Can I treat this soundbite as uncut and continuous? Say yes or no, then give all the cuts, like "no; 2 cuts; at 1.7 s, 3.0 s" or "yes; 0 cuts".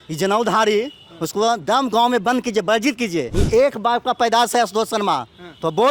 no; 1 cut; at 3.4 s